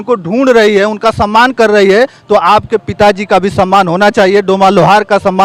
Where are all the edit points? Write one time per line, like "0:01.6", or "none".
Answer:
none